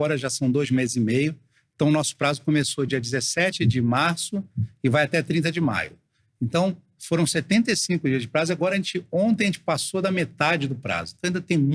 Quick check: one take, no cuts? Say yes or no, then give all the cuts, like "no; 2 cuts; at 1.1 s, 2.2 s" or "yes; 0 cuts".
yes; 0 cuts